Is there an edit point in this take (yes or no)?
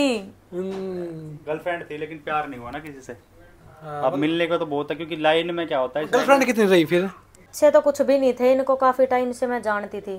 yes